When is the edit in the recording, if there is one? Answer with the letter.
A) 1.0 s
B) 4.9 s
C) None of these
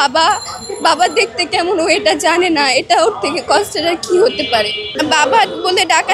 B